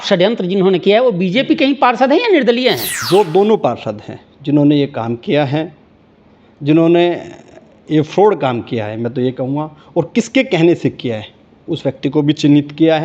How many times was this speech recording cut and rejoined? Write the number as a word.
one